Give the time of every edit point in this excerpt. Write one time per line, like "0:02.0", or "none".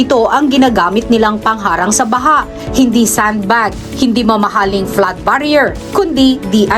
none

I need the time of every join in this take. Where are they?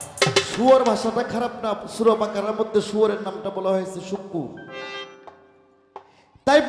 none

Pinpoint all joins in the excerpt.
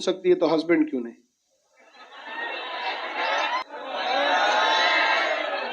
0:03.6

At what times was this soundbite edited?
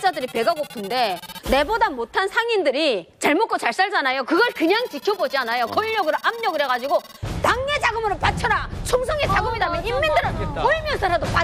none

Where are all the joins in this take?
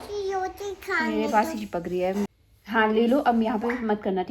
0:02.3

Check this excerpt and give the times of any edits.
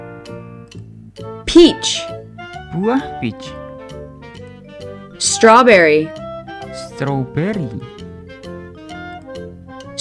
0:01.5

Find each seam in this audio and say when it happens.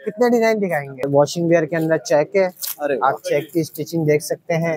0:01.1

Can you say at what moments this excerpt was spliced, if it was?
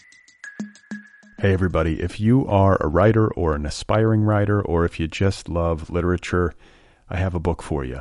0:00.9

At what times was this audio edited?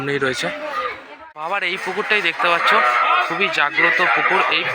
0:01.1

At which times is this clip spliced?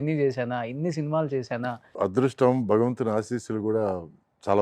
0:01.9

